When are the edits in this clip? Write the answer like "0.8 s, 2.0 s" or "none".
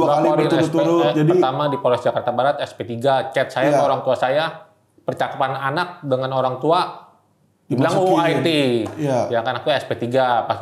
none